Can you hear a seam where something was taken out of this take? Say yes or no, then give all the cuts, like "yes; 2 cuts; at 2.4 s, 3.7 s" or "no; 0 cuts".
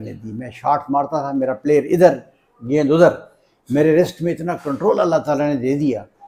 no; 0 cuts